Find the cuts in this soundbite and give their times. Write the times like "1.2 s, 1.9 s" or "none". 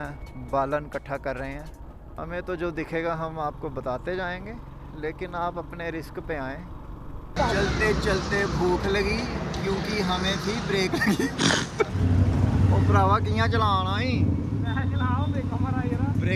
2.1 s, 7.4 s, 11.9 s